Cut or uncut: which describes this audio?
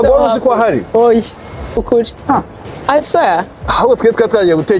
cut